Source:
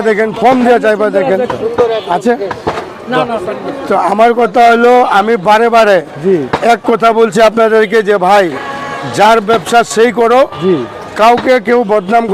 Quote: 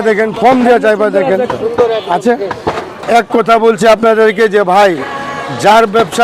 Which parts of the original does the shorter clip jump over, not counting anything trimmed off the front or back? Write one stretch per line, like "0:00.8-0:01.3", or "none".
0:03.0-0:06.5